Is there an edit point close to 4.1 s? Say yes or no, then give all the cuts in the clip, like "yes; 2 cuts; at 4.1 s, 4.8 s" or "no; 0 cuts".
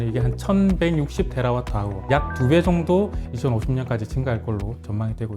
no; 1 cut; at 2.1 s